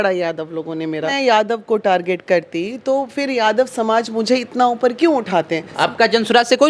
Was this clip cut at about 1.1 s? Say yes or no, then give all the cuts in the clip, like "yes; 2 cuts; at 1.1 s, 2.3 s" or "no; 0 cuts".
yes; 2 cuts; at 1.1 s, 5.7 s